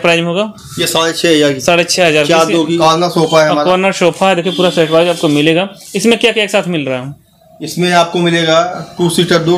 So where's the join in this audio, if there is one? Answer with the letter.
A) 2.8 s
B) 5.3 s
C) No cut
A